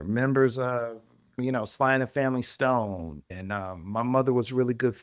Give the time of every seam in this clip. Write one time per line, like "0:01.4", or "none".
0:01.4
0:03.3